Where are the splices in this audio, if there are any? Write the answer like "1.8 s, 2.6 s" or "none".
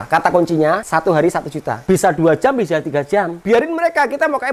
0.8 s, 1.8 s, 3.4 s